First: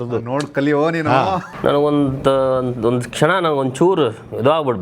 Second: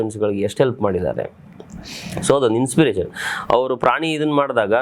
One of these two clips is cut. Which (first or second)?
first